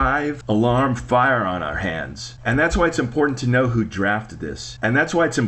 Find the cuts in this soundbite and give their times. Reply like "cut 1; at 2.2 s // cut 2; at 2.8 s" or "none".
none